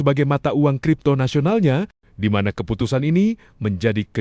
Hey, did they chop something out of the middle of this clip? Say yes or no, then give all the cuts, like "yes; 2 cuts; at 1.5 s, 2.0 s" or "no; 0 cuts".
yes; 1 cut; at 2.0 s